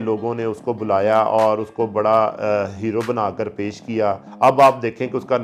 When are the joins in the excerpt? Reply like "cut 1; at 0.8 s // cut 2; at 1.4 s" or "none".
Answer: cut 1; at 4.3 s